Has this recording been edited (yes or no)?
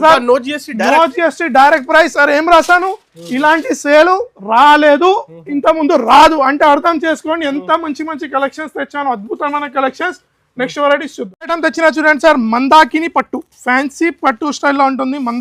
no